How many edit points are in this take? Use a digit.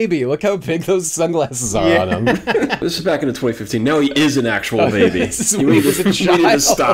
0